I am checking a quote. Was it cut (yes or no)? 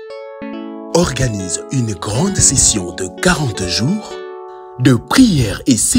yes